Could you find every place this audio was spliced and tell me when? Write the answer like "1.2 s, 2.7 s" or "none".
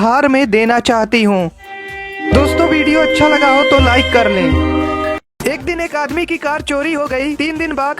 5.2 s

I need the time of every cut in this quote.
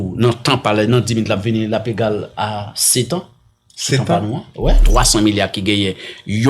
4.8 s

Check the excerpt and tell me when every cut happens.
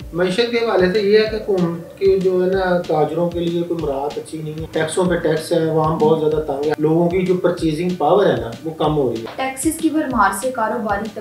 4.6 s, 6.8 s, 9.3 s

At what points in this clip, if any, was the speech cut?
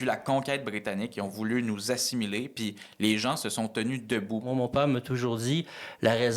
4.4 s

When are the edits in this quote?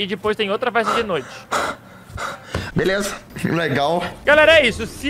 2.6 s, 4.2 s

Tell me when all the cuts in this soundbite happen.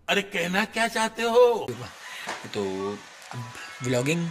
1.7 s

